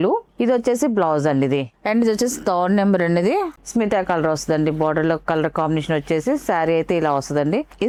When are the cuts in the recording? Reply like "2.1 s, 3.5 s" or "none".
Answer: none